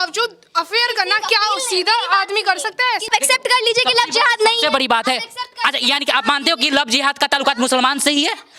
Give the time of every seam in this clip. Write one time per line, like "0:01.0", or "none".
0:03.1